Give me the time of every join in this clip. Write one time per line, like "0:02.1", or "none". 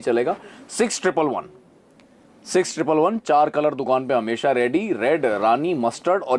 none